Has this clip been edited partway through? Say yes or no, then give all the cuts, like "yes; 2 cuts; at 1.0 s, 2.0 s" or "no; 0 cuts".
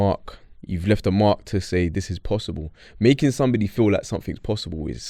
no; 0 cuts